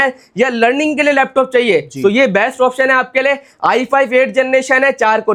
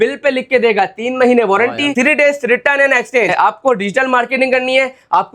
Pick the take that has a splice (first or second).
second